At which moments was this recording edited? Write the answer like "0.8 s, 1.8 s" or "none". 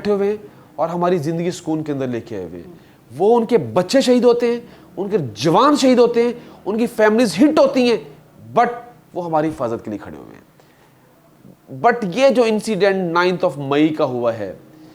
none